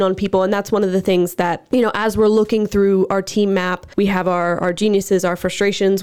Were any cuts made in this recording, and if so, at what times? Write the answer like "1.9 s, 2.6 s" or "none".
1.6 s, 3.8 s